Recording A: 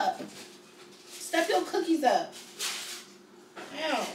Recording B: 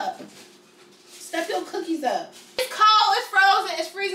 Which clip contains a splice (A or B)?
B